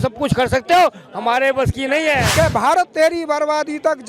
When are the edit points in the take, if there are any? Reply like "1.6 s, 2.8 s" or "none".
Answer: 2.3 s